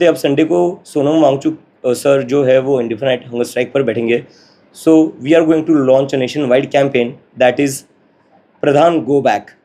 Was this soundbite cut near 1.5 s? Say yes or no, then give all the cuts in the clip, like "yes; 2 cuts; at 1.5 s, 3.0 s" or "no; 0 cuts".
no; 0 cuts